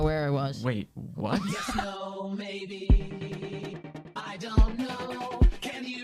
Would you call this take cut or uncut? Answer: cut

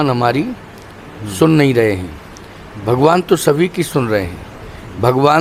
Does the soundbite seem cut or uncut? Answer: uncut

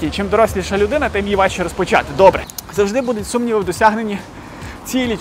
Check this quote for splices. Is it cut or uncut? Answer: cut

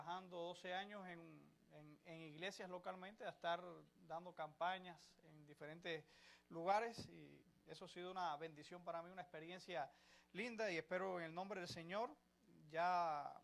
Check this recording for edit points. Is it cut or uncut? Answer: cut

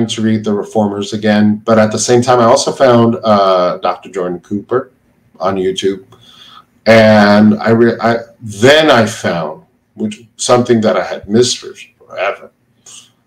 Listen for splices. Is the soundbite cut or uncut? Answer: uncut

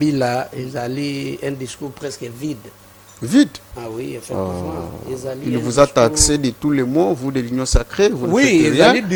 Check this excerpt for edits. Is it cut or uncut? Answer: uncut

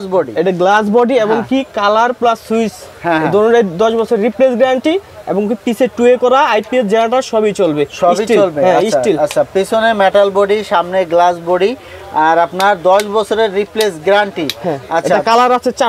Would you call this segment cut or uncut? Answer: uncut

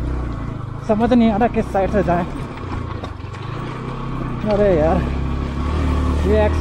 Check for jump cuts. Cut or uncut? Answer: uncut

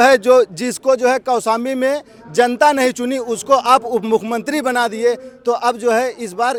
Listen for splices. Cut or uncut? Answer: uncut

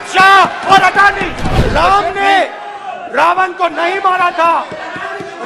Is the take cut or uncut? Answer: cut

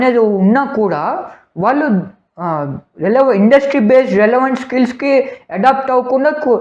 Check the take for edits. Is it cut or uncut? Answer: uncut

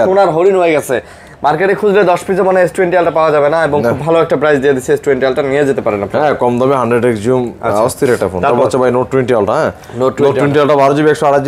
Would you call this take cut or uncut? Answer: uncut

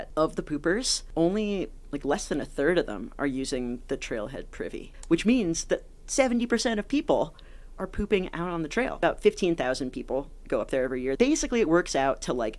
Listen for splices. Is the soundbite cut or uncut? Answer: cut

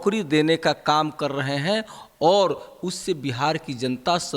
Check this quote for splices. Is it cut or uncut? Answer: uncut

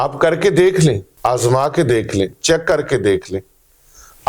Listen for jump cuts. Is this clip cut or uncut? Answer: cut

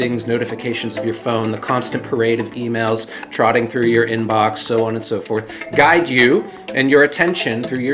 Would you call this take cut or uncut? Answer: uncut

